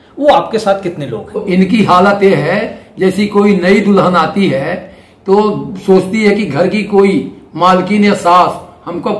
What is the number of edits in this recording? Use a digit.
1